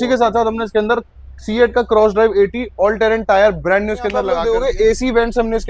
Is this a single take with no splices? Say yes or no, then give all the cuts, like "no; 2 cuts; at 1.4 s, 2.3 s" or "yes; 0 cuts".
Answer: no; 1 cut; at 4.3 s